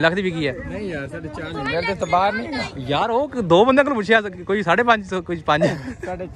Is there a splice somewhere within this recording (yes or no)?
no